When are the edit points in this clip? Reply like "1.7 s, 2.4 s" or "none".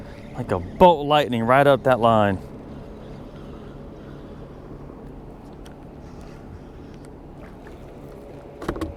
none